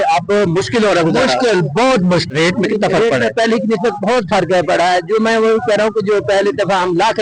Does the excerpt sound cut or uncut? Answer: cut